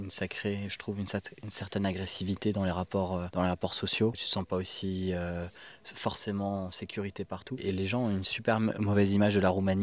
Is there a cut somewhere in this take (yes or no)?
yes